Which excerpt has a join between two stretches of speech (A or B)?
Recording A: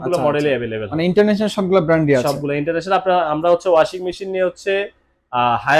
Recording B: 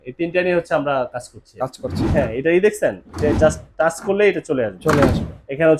B